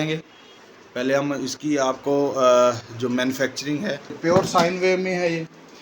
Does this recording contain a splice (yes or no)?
yes